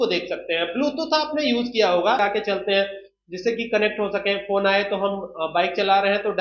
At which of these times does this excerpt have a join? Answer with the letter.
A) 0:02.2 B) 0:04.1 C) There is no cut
A